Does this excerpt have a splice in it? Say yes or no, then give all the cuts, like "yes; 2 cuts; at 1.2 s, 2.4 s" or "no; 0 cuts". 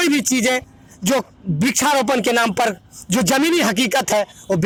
no; 0 cuts